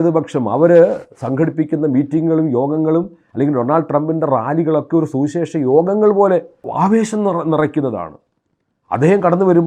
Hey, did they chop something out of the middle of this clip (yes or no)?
yes